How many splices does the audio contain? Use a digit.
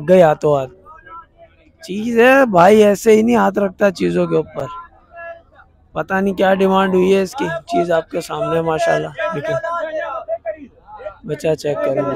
0